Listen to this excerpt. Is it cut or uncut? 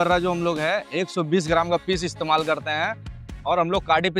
uncut